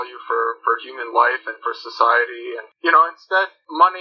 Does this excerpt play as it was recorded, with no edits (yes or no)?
no